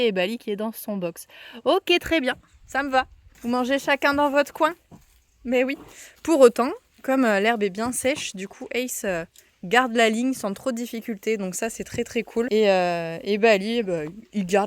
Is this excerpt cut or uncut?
cut